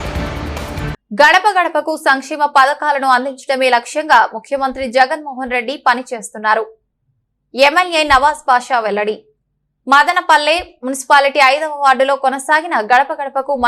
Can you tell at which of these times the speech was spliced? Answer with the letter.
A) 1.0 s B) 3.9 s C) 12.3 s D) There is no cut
A